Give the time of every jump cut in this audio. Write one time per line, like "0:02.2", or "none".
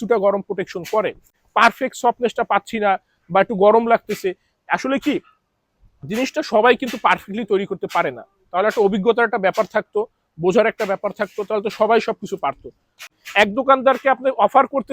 0:01.4
0:13.1